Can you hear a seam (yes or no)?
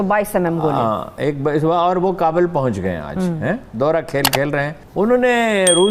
no